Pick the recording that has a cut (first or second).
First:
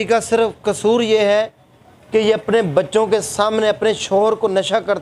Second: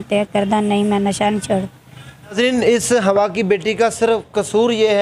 second